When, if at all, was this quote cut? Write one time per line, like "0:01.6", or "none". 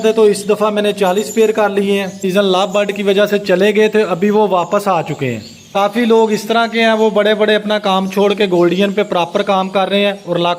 0:02.2
0:05.7